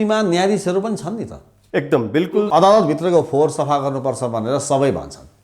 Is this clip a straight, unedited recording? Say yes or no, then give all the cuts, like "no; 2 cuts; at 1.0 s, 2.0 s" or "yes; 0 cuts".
no; 1 cut; at 2.3 s